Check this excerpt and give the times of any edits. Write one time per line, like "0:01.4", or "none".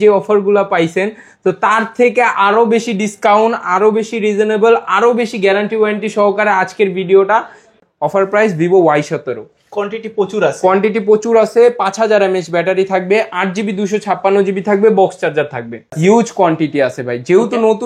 0:07.8
0:15.9